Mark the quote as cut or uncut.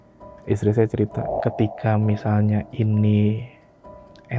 cut